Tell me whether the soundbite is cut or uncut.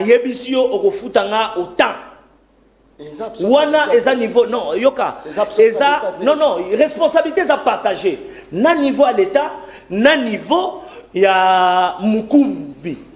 uncut